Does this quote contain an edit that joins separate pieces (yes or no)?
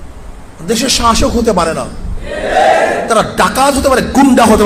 no